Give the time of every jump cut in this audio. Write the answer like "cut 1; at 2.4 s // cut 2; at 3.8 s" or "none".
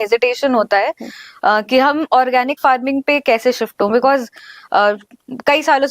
none